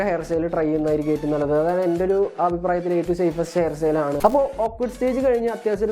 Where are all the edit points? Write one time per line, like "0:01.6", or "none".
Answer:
0:04.2